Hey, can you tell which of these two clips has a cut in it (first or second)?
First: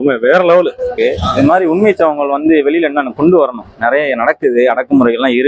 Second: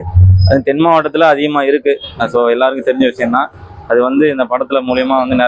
first